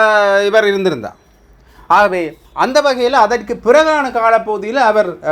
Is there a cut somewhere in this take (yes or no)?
no